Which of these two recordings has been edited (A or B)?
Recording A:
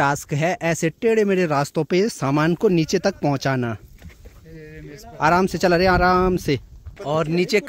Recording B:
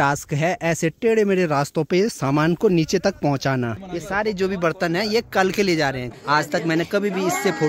B